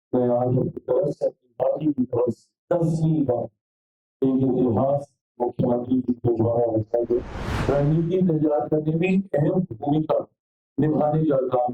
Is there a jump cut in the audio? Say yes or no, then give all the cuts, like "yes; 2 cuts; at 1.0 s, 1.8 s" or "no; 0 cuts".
yes; 1 cut; at 7.4 s